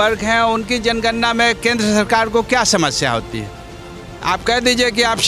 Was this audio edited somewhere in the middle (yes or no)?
no